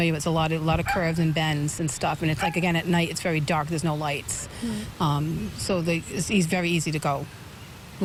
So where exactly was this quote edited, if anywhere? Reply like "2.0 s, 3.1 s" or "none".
none